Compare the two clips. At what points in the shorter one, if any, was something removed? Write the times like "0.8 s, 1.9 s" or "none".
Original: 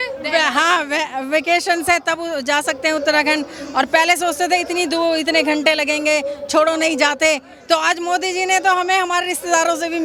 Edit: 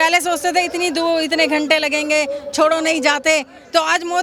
none